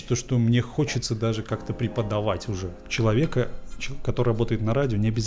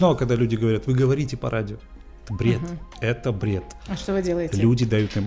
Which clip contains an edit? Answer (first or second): first